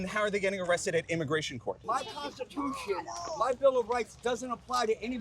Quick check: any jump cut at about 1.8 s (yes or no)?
yes